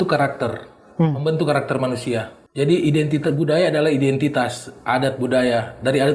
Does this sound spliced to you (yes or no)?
yes